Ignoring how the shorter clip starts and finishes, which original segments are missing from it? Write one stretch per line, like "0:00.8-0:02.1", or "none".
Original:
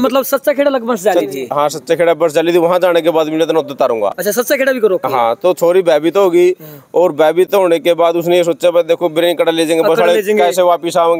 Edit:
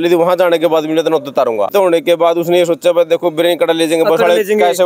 0:04.1-0:07.5